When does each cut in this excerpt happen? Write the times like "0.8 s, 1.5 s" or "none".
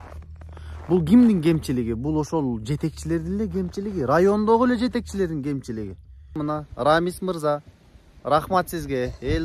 6.4 s